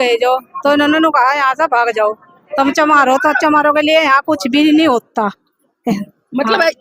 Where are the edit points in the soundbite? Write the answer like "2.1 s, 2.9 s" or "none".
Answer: none